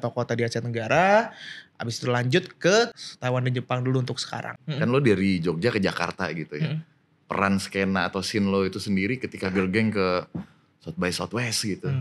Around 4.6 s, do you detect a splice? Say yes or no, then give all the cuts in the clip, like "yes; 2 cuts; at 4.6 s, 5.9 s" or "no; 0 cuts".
yes; 2 cuts; at 3.0 s, 4.6 s